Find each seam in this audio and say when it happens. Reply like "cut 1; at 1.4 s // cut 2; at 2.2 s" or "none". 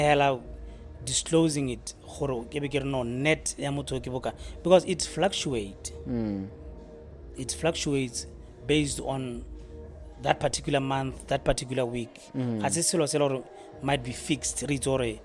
none